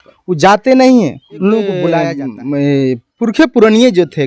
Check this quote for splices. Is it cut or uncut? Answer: cut